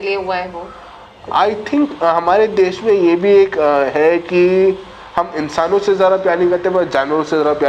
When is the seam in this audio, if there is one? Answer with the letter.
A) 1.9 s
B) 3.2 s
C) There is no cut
C